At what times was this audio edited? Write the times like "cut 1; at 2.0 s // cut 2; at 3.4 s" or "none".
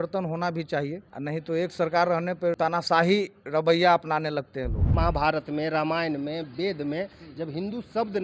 cut 1; at 1.1 s // cut 2; at 2.6 s // cut 3; at 4.8 s